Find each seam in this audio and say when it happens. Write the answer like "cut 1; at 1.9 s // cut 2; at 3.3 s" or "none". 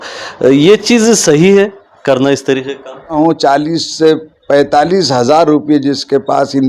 cut 1; at 2.9 s